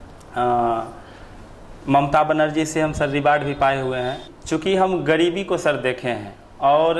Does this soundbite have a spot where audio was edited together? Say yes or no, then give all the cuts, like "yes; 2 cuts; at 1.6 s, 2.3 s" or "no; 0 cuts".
yes; 1 cut; at 4.3 s